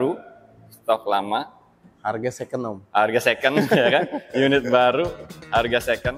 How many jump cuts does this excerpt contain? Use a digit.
0